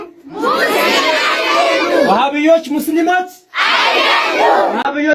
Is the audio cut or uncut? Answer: uncut